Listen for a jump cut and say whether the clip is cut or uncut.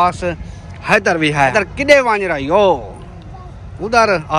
cut